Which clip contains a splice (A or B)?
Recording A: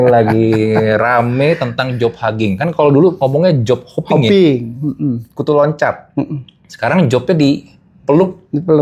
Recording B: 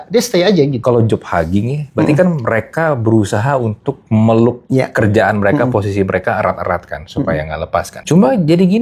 B